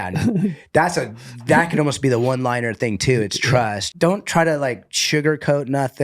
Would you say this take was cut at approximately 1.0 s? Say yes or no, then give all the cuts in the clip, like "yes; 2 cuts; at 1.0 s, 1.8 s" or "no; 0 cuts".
no; 1 cut; at 3.8 s